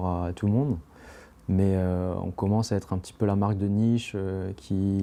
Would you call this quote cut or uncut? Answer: uncut